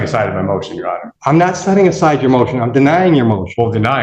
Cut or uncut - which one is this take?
cut